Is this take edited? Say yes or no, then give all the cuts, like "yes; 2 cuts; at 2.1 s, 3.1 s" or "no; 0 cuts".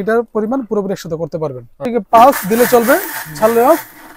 yes; 1 cut; at 1.8 s